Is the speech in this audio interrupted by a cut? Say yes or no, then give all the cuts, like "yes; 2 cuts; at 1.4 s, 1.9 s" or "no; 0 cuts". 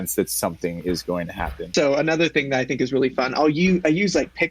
yes; 1 cut; at 1.7 s